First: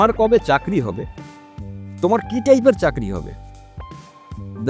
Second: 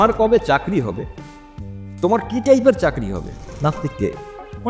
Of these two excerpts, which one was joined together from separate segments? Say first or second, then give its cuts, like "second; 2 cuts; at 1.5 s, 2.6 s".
second; 1 cut; at 3.5 s